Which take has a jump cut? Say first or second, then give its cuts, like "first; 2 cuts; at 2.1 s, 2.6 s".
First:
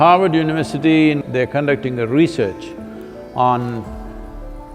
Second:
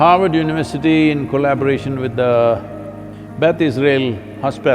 first; 1 cut; at 1.2 s